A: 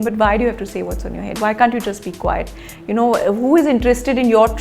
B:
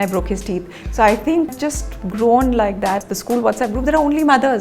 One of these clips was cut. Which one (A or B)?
B